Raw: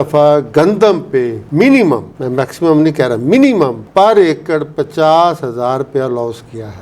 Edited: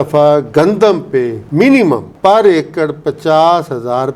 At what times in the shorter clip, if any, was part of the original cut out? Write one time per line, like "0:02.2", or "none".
0:02.1